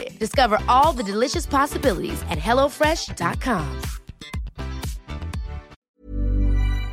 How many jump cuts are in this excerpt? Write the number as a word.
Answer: one